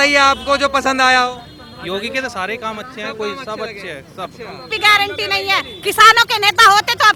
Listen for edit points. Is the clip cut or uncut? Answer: cut